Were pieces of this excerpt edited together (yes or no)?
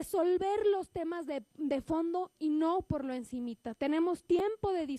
yes